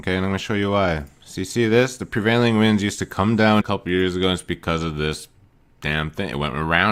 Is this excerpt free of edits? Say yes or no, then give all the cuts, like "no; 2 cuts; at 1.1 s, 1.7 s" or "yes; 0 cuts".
yes; 0 cuts